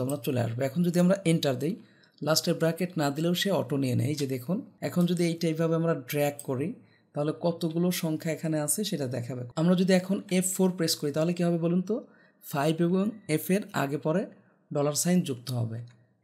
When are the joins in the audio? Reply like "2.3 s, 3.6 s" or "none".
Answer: 4.8 s, 9.4 s